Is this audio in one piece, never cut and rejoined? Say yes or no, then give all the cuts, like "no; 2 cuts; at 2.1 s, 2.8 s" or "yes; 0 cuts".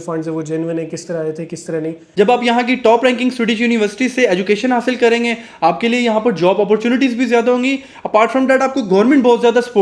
no; 1 cut; at 2.1 s